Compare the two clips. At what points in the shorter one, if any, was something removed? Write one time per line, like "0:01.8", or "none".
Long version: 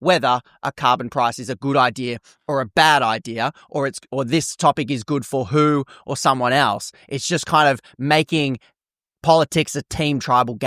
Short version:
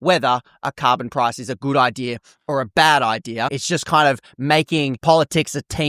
0:03.6
0:05.0